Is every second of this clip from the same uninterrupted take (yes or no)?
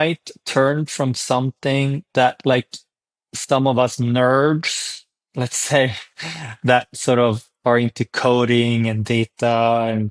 yes